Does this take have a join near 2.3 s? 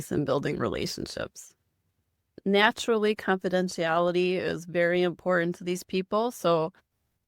yes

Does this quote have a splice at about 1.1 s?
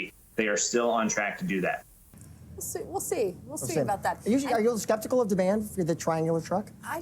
no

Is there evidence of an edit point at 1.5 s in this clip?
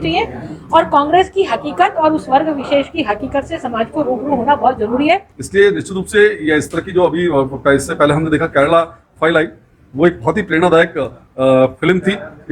no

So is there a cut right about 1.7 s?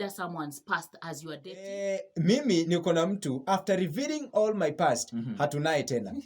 yes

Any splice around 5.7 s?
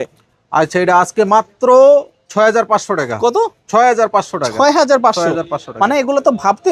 no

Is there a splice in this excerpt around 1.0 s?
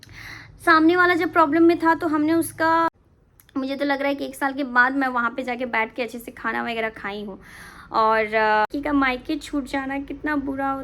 no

